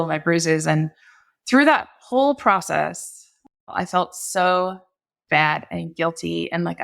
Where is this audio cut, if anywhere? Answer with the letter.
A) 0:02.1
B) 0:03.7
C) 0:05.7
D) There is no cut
B